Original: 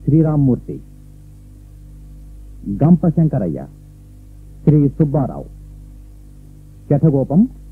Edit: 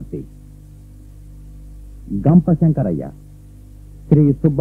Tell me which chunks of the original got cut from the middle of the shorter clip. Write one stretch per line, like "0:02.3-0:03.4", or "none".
none